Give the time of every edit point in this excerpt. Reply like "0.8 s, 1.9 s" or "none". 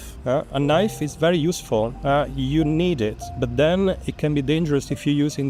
none

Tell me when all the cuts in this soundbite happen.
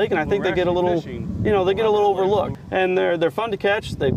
2.5 s

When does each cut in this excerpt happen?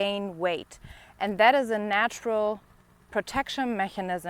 none

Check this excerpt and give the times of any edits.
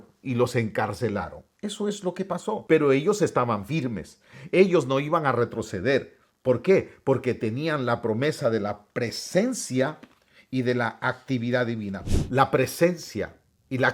2.6 s, 12.0 s

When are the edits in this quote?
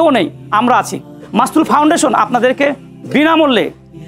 1.2 s

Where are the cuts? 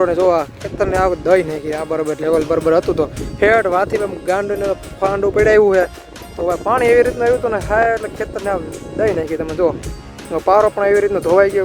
none

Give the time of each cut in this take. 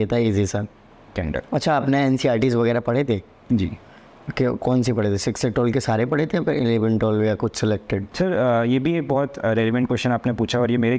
1.1 s, 8.1 s

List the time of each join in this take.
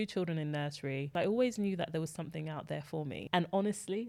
1.1 s, 3.2 s

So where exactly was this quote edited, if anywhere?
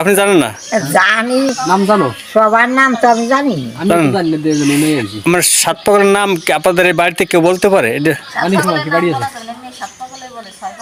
none

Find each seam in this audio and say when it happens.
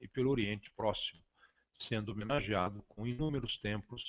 1.7 s

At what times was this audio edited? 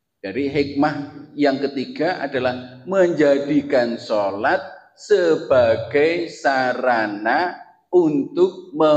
none

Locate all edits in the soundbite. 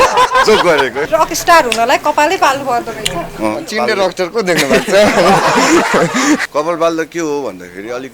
1.0 s, 6.4 s

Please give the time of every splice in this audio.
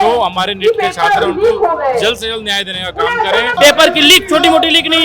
3.5 s

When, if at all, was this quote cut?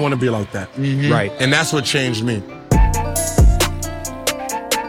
2.5 s

